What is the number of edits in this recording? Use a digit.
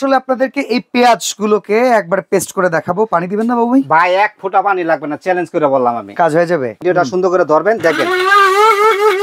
1